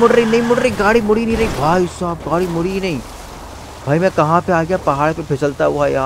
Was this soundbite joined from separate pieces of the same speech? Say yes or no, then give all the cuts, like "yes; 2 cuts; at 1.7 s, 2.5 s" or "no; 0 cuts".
no; 0 cuts